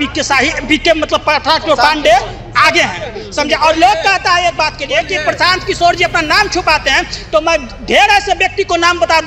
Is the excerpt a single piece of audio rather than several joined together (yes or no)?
yes